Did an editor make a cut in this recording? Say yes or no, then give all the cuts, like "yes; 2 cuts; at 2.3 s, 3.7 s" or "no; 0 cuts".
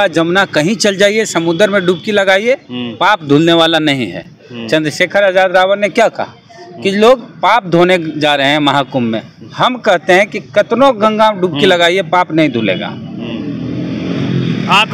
no; 0 cuts